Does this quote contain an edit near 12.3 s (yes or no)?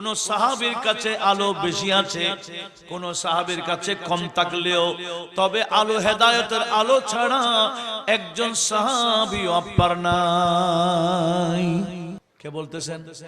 yes